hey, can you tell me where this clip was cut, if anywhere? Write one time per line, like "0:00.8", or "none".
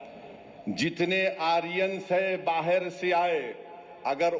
none